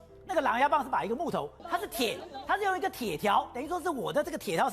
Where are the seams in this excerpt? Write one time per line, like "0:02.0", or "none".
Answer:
0:01.6